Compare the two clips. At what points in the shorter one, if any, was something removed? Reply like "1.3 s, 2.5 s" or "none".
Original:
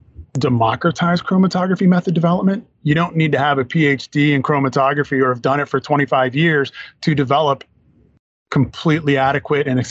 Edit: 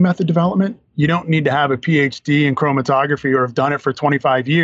none